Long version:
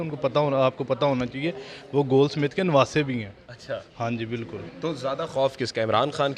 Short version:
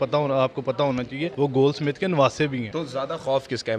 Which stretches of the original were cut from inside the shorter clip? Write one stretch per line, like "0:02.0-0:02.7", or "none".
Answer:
0:01.5-0:01.8
0:03.2-0:04.8